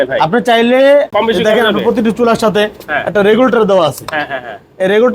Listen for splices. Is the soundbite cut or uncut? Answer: cut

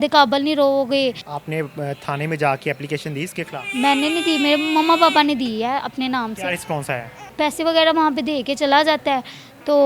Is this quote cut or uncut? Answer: cut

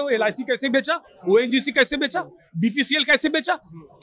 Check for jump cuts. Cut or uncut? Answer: uncut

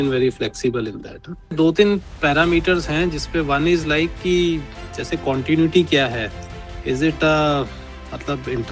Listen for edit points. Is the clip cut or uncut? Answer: cut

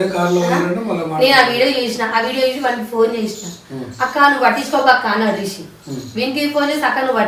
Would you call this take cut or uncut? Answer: uncut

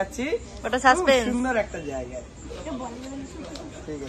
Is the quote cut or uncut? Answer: uncut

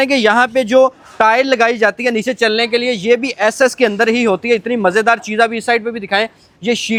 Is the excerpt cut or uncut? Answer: uncut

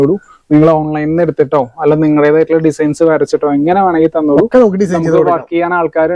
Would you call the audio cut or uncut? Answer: uncut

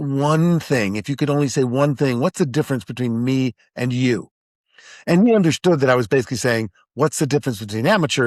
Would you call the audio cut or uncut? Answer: uncut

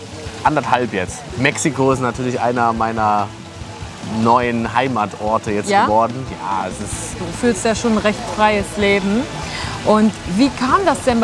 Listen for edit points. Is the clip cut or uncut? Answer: cut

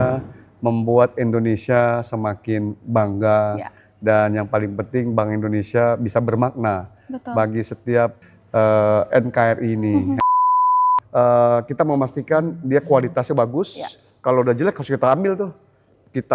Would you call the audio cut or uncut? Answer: cut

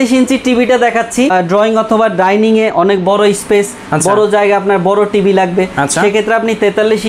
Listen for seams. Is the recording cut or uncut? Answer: cut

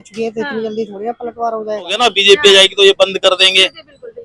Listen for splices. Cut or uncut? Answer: cut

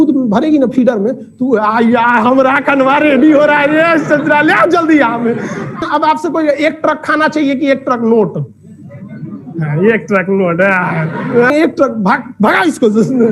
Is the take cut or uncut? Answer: cut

